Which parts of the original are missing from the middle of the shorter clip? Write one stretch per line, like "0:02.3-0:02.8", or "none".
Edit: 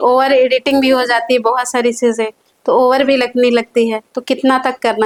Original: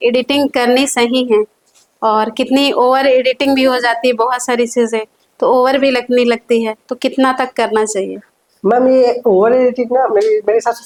none